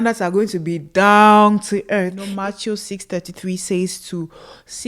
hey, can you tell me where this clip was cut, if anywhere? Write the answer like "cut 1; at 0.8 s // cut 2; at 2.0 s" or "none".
cut 1; at 2.2 s